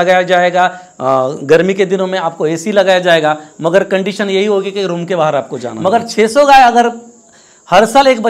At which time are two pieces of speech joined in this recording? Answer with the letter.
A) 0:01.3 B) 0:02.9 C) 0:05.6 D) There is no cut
C